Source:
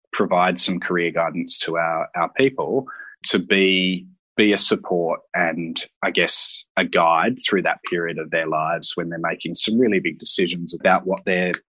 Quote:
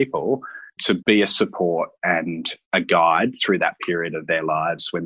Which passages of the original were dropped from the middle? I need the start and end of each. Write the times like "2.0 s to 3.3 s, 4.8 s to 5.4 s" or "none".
3.4 s to 4.3 s, 5.8 s to 6.6 s